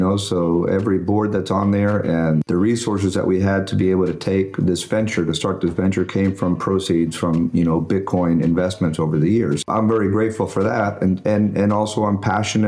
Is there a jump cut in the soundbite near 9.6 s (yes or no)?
yes